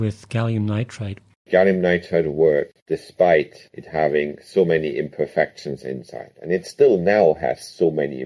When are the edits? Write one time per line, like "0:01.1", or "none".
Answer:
0:01.5
0:02.8